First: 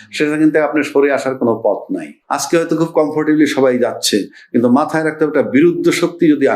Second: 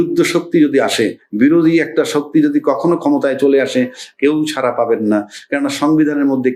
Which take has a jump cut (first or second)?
first